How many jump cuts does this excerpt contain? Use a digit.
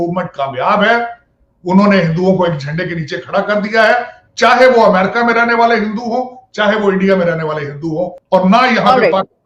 1